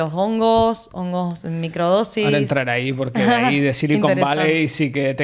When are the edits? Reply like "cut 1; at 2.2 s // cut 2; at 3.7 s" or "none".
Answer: none